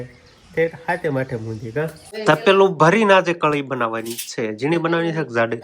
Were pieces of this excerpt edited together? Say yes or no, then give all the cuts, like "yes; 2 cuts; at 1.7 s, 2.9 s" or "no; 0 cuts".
yes; 1 cut; at 2.2 s